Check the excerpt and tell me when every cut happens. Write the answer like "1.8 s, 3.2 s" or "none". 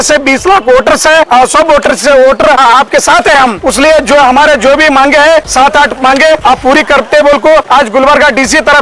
1.3 s, 2.6 s, 3.6 s, 5.5 s, 6.4 s, 7.7 s

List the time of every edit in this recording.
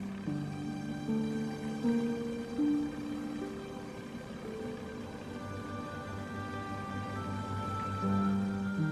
none

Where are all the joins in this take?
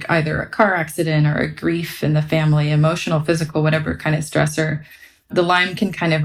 none

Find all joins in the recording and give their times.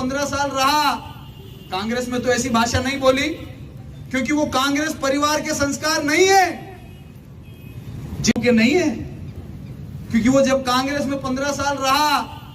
8.3 s

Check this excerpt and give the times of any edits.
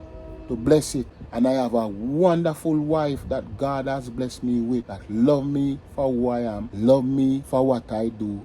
1.2 s, 5.0 s, 6.6 s, 7.4 s

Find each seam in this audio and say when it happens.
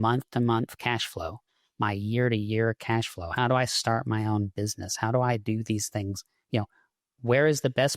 none

